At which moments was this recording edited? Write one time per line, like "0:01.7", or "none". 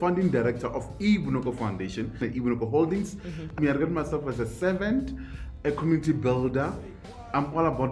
0:02.2
0:03.5
0:05.5